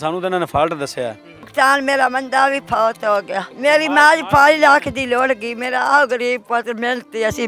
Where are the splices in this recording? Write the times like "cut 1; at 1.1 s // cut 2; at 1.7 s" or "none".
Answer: cut 1; at 1.5 s // cut 2; at 3.4 s